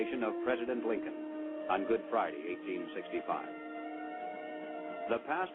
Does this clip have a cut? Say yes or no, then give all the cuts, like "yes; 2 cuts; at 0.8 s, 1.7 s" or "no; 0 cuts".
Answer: yes; 1 cut; at 3.4 s